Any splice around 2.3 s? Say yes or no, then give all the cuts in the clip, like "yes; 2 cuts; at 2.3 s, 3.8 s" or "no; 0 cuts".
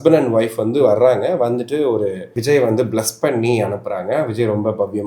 yes; 1 cut; at 2.3 s